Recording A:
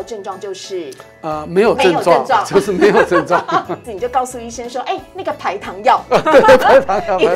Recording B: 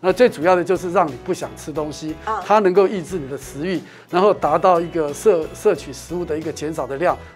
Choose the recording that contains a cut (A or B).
A